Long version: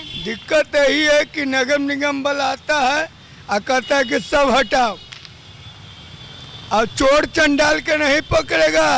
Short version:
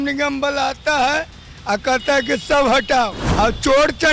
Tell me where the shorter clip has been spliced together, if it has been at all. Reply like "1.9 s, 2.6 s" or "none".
3.2 s